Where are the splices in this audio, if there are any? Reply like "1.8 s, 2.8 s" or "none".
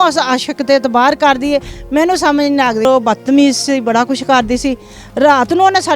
2.9 s